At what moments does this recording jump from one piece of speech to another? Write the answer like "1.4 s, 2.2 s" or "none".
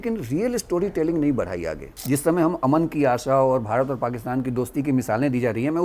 2.0 s